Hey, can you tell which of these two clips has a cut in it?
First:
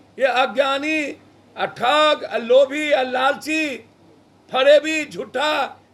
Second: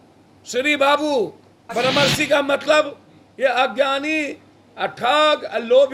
second; 1 cut; at 1.6 s

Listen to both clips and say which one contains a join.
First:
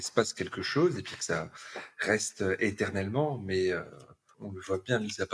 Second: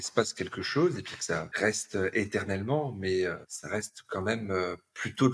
second; 2 cuts; at 1.5 s, 3.5 s

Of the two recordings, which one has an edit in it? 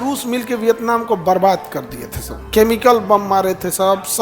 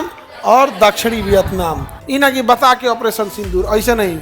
second; 1 cut; at 1.9 s

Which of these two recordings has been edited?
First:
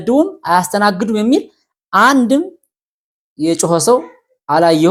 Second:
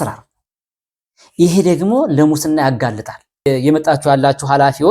second; 1 cut; at 3.5 s

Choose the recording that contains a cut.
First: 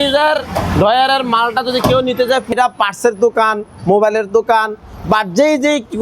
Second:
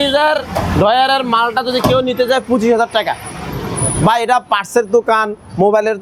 first; 1 cut; at 2.5 s

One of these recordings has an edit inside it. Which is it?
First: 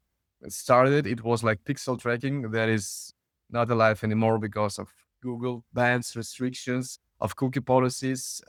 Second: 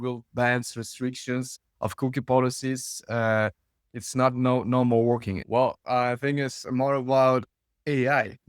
second; 1 cut; at 5.3 s

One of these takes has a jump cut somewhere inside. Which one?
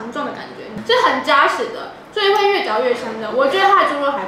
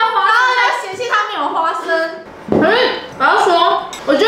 second; 1 cut; at 2.3 s

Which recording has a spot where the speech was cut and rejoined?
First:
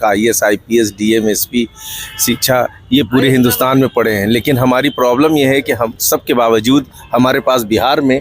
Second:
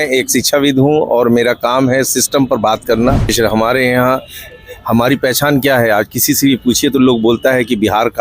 second; 1 cut; at 3.3 s

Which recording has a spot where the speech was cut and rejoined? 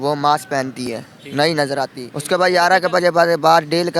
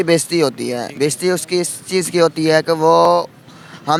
first; 1 cut; at 2.1 s

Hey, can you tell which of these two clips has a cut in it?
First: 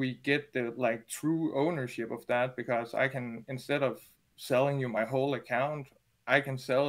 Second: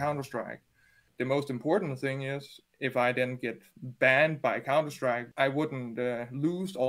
second; 2 cuts; at 1.1 s, 5.3 s

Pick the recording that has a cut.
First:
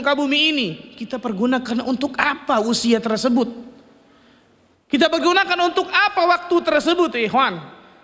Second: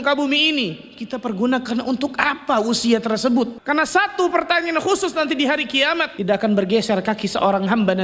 second; 2 cuts; at 3.6 s, 6.1 s

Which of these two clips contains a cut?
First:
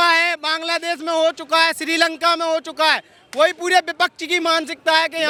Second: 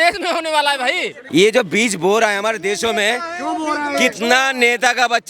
second; 1 cut; at 1.1 s

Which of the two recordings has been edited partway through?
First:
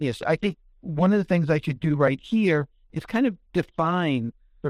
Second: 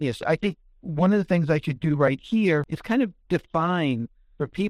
second; 1 cut; at 2.7 s

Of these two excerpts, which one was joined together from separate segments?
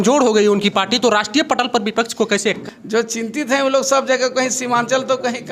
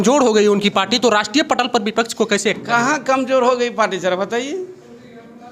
first; 1 cut; at 2.6 s

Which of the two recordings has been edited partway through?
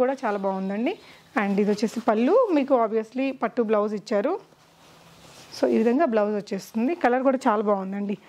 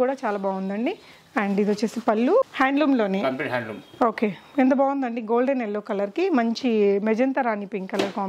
second; 1 cut; at 2.4 s

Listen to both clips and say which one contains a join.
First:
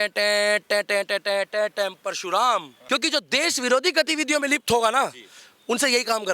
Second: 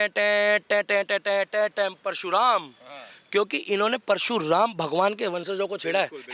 first; 1 cut; at 2.8 s

